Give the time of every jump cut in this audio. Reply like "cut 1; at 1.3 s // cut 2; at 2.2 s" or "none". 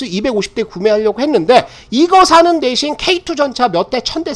none